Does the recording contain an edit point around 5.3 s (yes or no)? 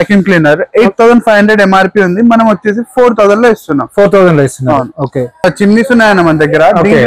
yes